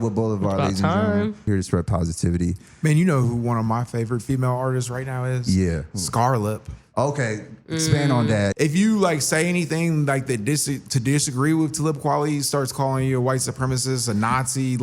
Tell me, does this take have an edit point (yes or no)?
yes